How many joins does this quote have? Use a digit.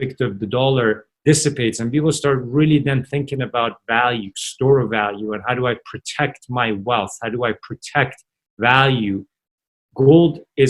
0